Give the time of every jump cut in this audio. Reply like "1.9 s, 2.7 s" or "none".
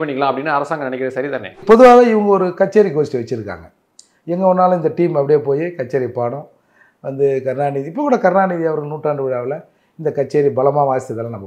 1.6 s